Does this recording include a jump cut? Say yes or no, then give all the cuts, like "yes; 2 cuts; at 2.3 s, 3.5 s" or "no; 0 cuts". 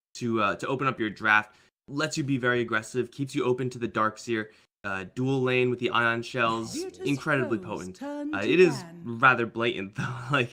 no; 0 cuts